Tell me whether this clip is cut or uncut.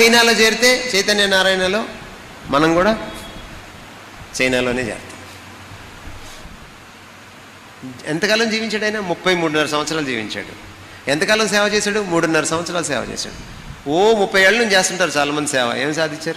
cut